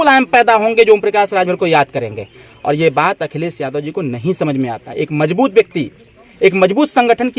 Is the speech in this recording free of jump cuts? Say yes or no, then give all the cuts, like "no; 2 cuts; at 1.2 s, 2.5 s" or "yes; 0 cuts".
yes; 0 cuts